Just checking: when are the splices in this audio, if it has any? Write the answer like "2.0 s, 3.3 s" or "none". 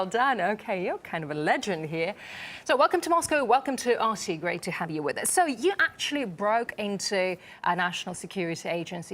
1.5 s